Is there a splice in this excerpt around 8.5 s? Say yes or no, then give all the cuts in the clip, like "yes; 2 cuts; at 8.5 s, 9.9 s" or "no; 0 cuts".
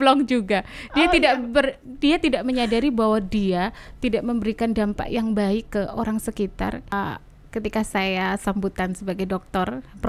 no; 1 cut; at 6.9 s